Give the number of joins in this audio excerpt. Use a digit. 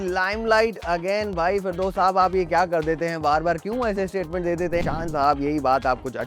1